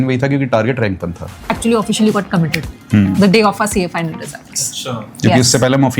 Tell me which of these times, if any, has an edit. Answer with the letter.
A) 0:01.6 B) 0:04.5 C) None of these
A